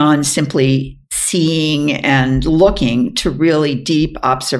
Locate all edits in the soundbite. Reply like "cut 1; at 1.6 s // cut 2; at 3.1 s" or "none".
none